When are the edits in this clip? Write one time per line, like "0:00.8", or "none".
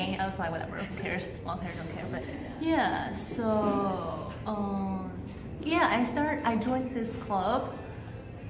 0:02.2